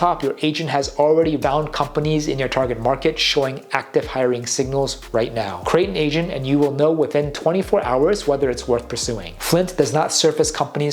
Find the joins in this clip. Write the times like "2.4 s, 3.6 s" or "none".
1.4 s, 5.6 s, 9.2 s